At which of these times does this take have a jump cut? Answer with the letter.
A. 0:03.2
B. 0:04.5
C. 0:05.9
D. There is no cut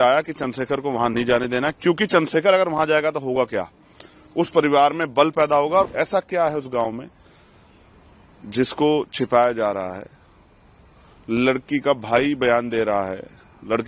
C